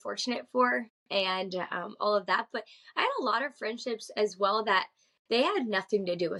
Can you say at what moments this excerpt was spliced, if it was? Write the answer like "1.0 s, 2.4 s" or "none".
none

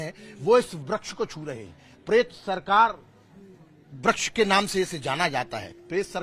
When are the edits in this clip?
none

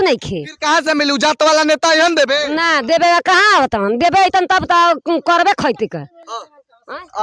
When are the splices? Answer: none

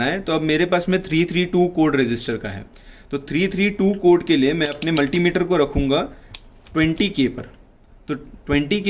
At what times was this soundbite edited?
none

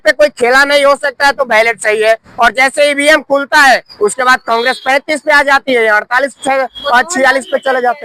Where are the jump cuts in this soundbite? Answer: none

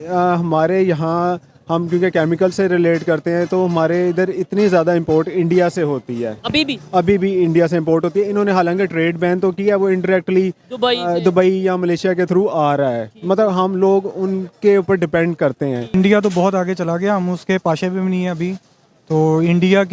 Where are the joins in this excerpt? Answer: 15.9 s

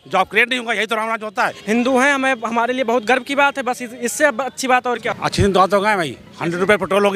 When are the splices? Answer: 1.6 s, 5.0 s

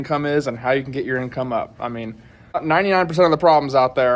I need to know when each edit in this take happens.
2.6 s

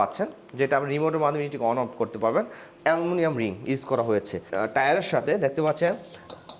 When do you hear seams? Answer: 2.7 s, 4.5 s

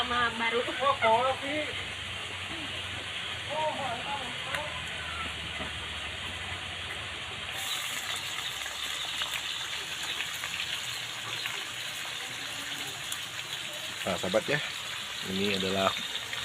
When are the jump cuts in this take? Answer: 7.6 s

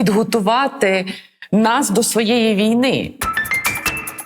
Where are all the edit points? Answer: 3.2 s

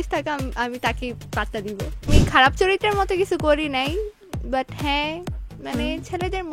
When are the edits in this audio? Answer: 2.1 s

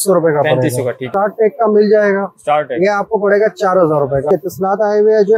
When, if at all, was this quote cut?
1.1 s, 4.3 s

